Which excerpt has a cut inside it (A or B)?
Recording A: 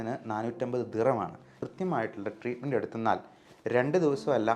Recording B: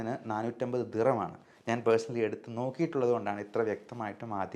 A